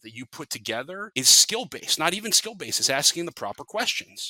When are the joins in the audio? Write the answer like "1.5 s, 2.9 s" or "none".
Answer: 1.1 s